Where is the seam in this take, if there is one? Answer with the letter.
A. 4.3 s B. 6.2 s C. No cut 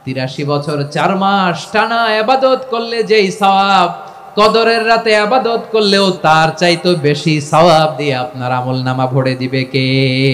B